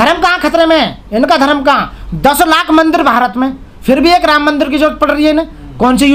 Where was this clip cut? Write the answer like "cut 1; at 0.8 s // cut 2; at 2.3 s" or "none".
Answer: none